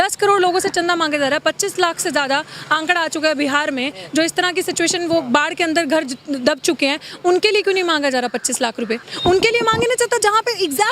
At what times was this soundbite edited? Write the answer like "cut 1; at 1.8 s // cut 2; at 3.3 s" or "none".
cut 1; at 9.1 s